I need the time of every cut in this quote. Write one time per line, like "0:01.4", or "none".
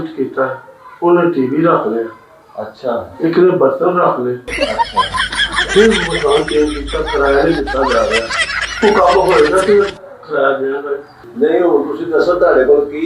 0:11.3